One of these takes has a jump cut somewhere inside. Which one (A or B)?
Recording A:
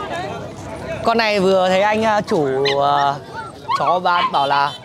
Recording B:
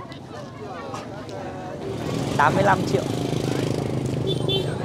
B